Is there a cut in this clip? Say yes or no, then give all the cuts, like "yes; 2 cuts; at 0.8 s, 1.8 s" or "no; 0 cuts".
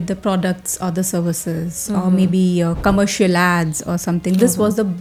no; 0 cuts